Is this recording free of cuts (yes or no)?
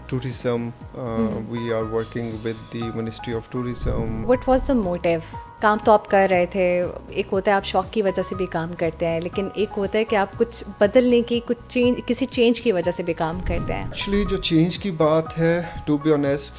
no